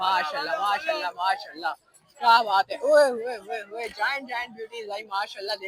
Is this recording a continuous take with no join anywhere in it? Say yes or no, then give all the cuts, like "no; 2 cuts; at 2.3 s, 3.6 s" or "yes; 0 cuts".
yes; 0 cuts